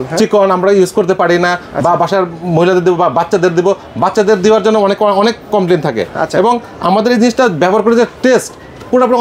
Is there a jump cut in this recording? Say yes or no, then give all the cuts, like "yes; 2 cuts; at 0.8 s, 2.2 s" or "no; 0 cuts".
no; 0 cuts